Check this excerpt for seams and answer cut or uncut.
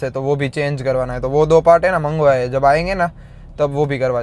uncut